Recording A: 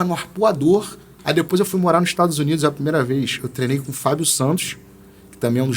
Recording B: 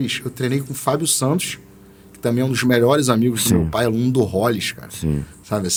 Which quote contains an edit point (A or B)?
A